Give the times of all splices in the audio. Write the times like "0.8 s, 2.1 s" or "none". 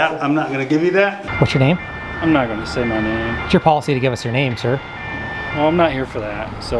1.2 s

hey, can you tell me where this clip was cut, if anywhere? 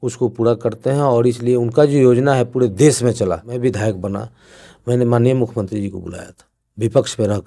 3.5 s

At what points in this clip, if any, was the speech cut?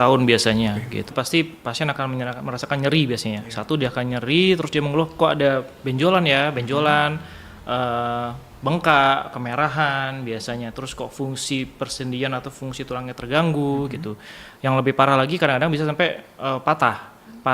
1.1 s

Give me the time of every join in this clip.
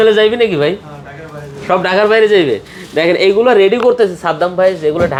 none

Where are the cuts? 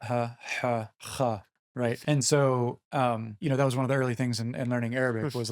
2.0 s, 3.3 s

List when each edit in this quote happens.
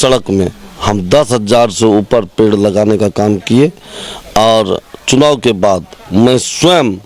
none

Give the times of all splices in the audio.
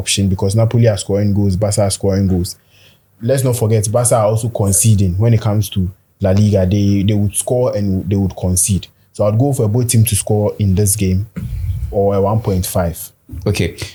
none

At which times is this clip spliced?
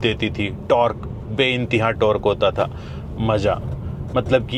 none

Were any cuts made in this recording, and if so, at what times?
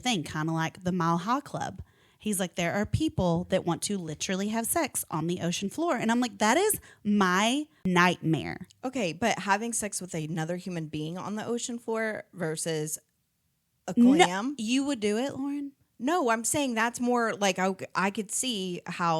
7.7 s

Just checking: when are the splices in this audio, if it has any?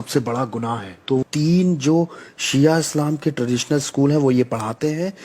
1.2 s

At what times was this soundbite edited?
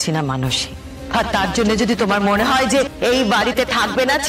0.9 s

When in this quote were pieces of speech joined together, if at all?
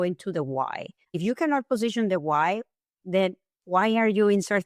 1.2 s

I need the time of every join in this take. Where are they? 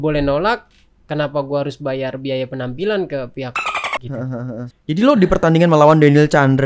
4.7 s

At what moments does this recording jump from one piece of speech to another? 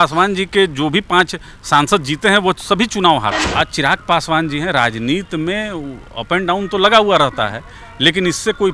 3.4 s

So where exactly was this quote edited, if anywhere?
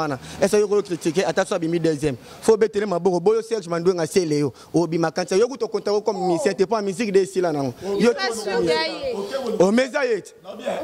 none

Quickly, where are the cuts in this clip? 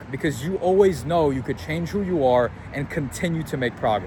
none

